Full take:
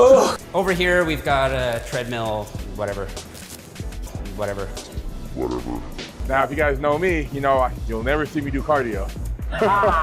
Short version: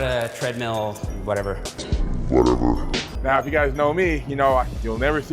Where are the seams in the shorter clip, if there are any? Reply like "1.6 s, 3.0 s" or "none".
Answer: 1.9 s